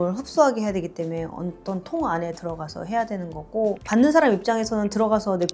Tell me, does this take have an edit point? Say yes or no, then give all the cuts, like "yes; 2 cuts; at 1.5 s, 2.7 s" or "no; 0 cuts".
yes; 1 cut; at 3.7 s